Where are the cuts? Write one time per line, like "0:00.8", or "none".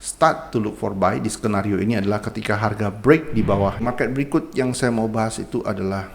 0:03.8